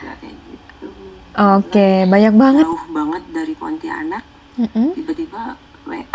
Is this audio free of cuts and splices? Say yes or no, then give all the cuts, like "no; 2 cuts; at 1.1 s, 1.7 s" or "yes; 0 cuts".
no; 1 cut; at 2.7 s